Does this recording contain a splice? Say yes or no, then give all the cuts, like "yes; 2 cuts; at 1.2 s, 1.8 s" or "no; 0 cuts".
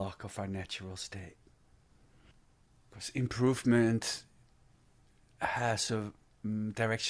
yes; 1 cut; at 2.3 s